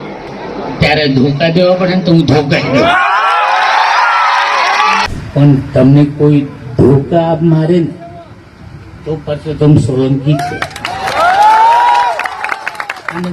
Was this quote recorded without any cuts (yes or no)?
no